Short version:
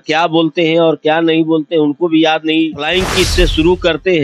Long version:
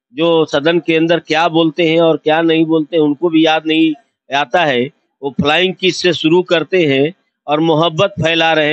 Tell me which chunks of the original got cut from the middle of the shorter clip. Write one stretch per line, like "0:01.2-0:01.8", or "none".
0:04.0-0:05.5